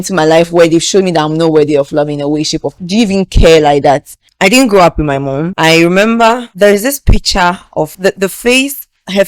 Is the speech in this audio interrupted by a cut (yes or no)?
yes